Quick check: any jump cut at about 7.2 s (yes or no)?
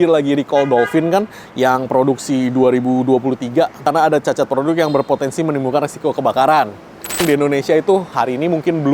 yes